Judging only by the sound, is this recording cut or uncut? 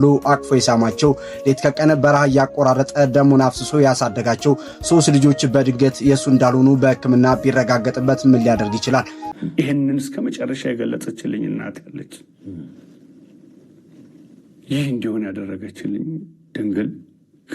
cut